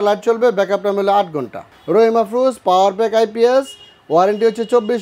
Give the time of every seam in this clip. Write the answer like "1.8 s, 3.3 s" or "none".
1.7 s